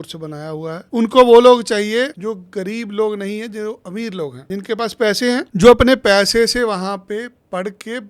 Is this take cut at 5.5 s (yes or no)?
yes